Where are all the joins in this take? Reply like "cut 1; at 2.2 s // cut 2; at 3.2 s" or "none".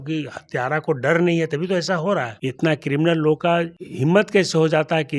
cut 1; at 2.4 s // cut 2; at 3.8 s